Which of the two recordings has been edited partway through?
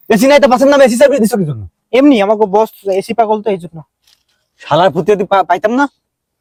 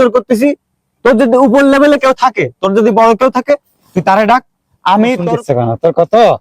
second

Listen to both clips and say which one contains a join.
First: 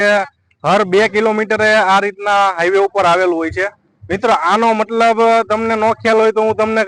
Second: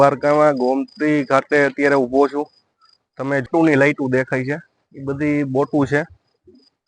second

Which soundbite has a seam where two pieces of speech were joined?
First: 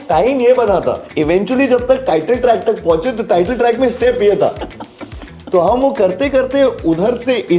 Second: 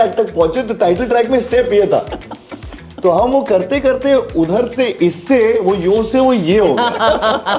first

